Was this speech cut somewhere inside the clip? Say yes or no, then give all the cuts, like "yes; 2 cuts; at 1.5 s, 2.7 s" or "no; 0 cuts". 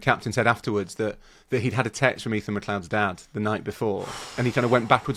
no; 0 cuts